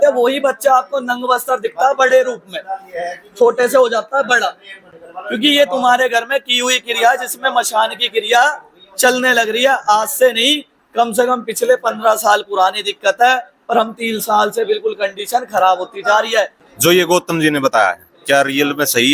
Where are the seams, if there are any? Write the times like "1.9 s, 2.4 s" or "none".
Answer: 16.6 s